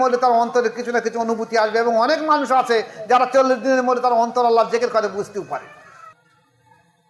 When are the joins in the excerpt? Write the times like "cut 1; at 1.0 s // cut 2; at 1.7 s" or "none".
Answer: cut 1; at 6.1 s